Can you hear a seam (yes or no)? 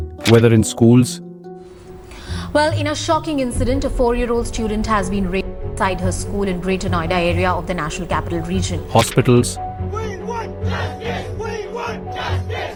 no